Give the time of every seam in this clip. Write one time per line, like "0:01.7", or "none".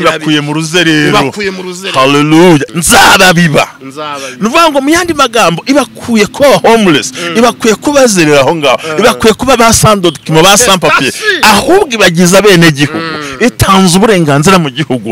0:02.7